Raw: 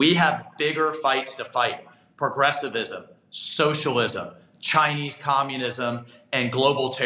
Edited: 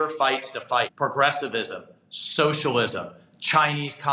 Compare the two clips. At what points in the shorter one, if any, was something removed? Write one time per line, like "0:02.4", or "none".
0:00.9